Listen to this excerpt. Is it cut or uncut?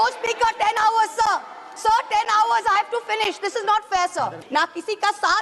cut